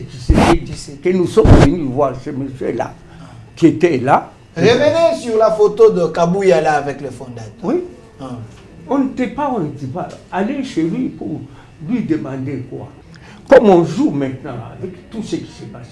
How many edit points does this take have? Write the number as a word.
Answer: one